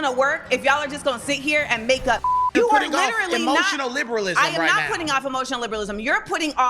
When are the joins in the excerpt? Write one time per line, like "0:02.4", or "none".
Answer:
0:02.4